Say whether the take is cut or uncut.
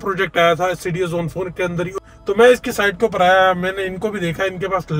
cut